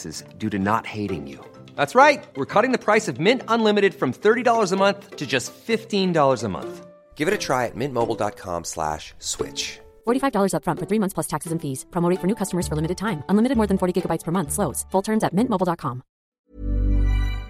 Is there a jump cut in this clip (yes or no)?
yes